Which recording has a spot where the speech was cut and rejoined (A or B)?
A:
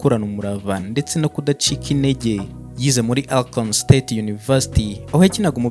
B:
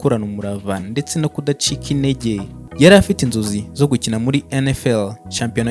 B